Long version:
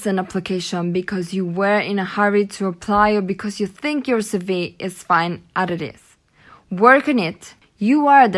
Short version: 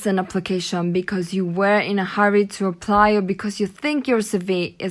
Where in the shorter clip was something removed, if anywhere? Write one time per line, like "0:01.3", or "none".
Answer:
none